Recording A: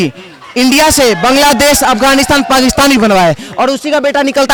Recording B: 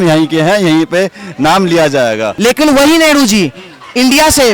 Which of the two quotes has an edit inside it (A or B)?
B